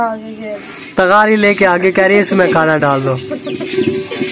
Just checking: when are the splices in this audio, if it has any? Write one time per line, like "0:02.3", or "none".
none

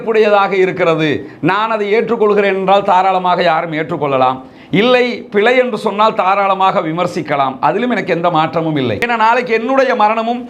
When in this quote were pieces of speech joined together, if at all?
0:09.0

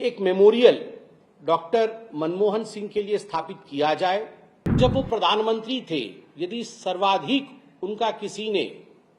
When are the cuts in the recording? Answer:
0:04.7

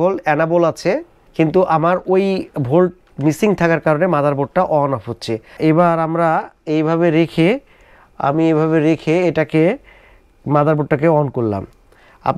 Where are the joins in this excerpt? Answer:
0:01.2
0:05.5

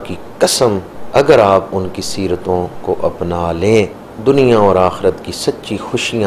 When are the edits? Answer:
0:00.9
0:04.0

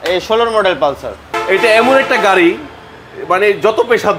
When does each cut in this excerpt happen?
0:01.3

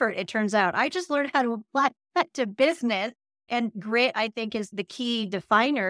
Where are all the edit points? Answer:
0:03.5
0:04.7

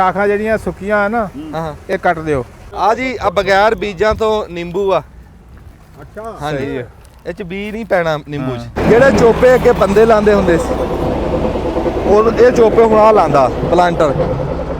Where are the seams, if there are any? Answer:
0:02.6
0:08.8

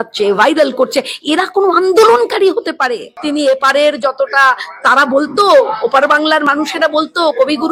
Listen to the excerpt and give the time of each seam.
0:03.1

